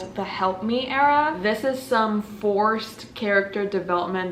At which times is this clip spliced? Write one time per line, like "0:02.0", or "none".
0:01.4